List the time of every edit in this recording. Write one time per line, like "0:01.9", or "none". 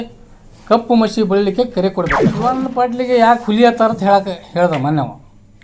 0:02.6